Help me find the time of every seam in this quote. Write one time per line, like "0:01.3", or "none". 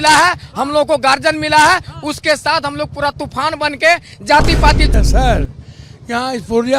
0:04.9